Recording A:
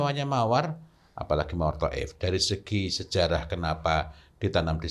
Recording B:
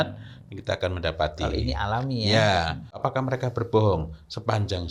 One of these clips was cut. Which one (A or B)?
B